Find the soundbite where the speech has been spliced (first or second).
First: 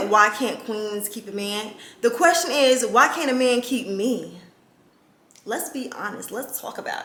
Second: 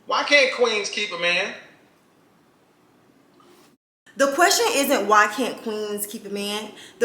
second